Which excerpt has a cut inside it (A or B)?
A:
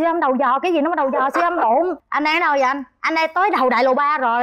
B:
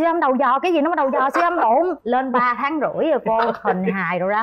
A